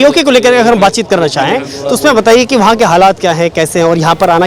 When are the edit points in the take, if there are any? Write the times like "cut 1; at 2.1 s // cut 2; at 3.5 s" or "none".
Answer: none